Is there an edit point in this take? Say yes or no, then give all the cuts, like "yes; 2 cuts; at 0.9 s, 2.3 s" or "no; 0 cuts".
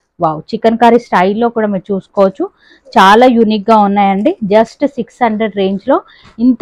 no; 0 cuts